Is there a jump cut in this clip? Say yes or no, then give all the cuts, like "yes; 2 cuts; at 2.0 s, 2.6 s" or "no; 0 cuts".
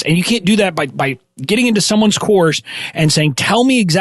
no; 0 cuts